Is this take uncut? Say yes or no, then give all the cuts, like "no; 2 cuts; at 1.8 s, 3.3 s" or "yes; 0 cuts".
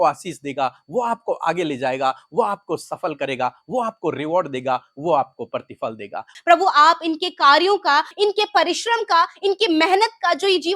no; 2 cuts; at 6.3 s, 8.1 s